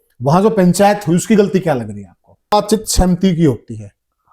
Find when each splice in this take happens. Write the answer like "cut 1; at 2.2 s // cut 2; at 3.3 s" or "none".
cut 1; at 2.5 s

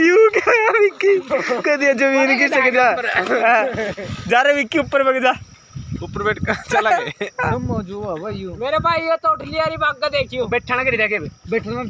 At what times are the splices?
none

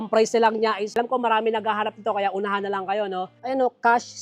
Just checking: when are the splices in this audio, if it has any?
cut 1; at 0.9 s // cut 2; at 3.3 s

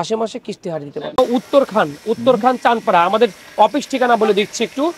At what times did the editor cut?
cut 1; at 1.2 s

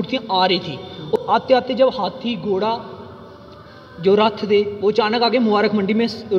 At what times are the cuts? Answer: cut 1; at 1.2 s

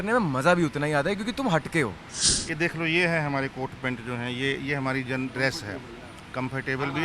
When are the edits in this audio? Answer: cut 1; at 2.2 s

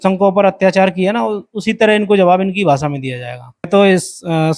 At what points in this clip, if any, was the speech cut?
cut 1; at 3.7 s

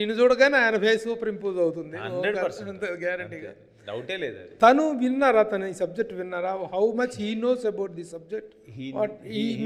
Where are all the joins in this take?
none

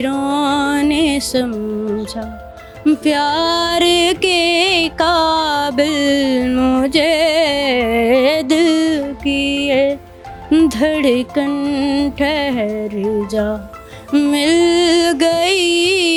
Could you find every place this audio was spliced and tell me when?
none

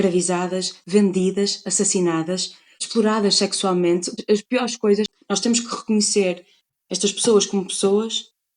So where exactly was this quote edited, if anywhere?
cut 1; at 5.2 s

